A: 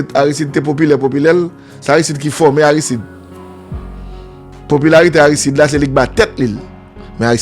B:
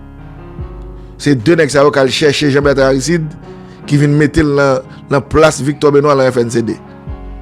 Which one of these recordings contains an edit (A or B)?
A